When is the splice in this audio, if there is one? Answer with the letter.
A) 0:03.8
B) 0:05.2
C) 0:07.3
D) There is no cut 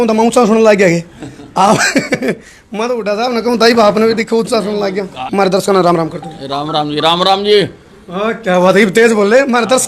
B